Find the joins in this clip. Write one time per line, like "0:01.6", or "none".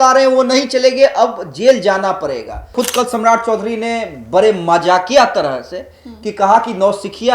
0:02.7